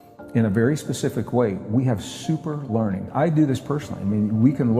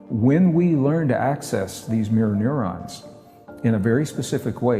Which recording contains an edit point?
first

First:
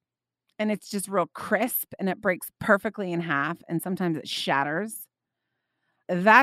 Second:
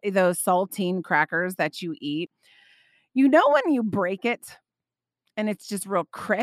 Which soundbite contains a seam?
second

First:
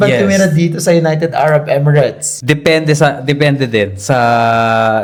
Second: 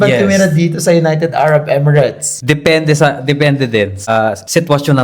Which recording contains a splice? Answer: second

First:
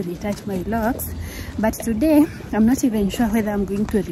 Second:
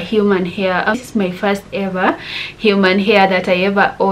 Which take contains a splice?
second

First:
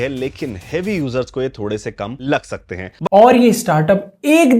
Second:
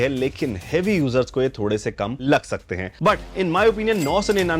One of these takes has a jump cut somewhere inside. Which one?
first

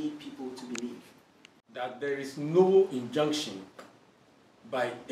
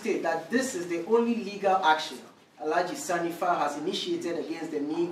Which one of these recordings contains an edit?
first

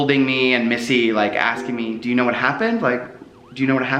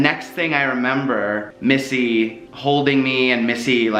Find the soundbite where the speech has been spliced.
second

